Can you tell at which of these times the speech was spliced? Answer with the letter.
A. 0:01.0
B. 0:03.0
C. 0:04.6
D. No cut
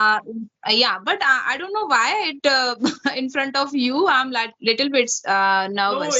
D